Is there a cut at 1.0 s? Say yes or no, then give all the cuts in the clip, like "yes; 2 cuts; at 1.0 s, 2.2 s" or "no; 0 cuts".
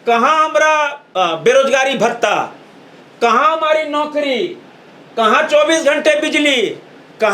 yes; 1 cut; at 1.0 s